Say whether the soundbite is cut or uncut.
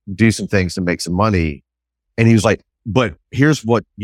uncut